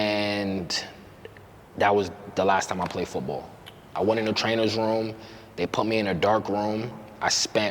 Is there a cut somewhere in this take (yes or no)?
no